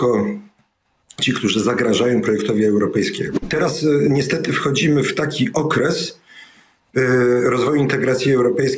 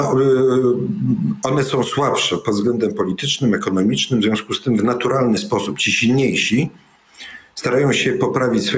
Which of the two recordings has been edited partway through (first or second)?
first